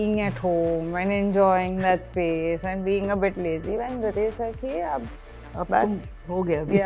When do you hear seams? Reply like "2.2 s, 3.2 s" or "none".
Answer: none